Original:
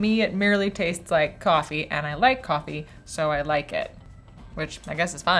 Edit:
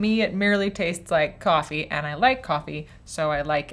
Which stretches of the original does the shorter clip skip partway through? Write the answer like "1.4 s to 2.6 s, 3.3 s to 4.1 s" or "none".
none